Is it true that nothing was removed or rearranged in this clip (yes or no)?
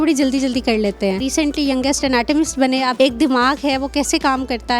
no